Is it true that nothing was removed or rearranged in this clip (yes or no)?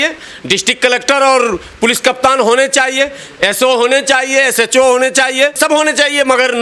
yes